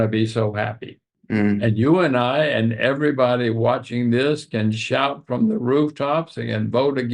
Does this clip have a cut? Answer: yes; 1 cut; at 1.1 s

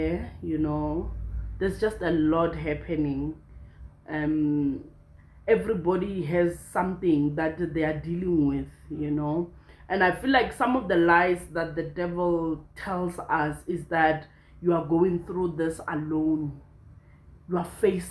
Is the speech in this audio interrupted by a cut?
no; 0 cuts

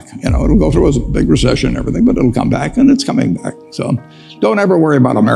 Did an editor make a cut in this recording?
no; 0 cuts

